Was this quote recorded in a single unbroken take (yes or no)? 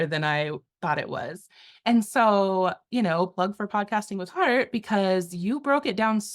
yes